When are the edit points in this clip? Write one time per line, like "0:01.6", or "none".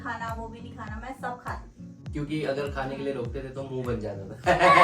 0:01.9